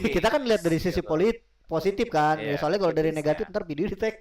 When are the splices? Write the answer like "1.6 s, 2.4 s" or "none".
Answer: none